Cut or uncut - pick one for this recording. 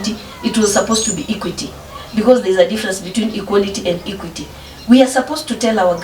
uncut